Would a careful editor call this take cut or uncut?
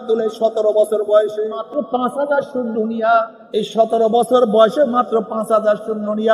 cut